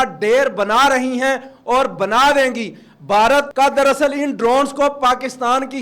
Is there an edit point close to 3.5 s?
yes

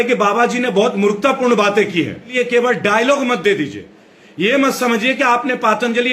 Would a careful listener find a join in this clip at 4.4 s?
no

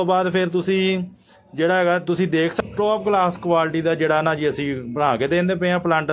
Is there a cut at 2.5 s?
yes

